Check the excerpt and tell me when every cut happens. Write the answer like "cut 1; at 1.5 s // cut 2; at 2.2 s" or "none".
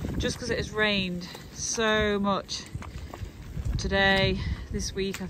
none